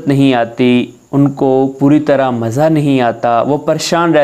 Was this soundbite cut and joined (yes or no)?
no